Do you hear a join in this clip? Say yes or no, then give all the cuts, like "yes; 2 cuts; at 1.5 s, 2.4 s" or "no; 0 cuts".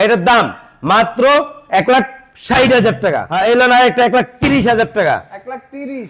yes; 1 cut; at 3.3 s